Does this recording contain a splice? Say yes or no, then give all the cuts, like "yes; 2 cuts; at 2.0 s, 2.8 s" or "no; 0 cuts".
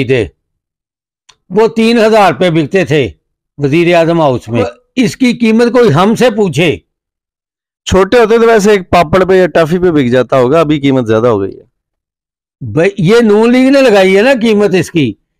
yes; 1 cut; at 4.7 s